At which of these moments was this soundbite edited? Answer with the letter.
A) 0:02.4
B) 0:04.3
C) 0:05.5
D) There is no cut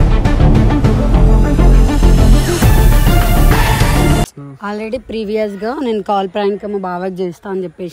D